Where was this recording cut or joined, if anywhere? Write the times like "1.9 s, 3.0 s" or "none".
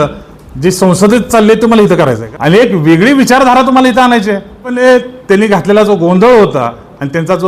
2.2 s, 4.8 s